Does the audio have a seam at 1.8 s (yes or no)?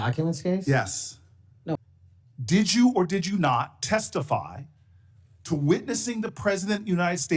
yes